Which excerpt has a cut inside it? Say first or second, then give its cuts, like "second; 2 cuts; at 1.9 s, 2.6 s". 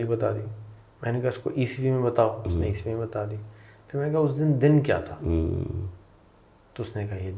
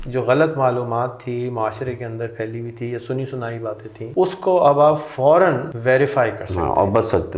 second; 2 cuts; at 4.0 s, 5.7 s